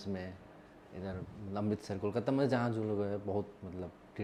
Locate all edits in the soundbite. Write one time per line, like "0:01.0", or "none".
none